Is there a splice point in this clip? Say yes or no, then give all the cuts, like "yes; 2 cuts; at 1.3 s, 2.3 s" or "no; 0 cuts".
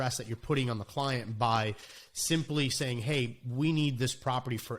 no; 0 cuts